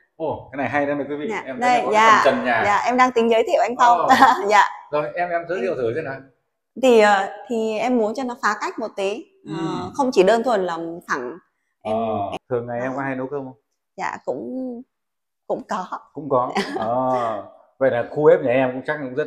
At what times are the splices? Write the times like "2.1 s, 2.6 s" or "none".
12.3 s